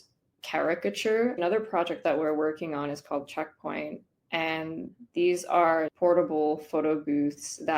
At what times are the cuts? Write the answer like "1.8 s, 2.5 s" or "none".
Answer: 1.4 s